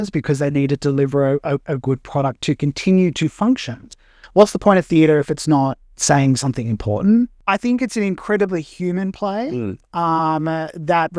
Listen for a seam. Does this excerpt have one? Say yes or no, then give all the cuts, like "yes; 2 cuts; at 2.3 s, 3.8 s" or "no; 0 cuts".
yes; 2 cuts; at 4.1 s, 7.4 s